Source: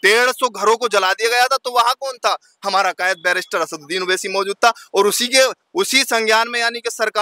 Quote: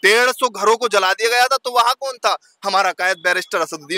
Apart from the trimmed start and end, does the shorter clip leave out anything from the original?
no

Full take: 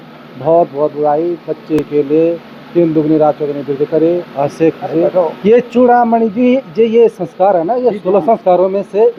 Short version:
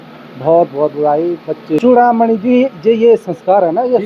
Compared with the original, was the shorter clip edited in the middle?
yes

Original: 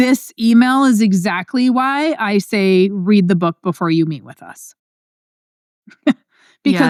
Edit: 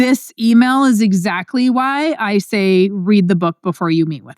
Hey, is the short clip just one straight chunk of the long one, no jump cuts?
yes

